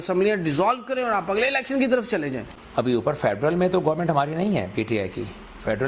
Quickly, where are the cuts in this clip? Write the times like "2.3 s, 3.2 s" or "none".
3.0 s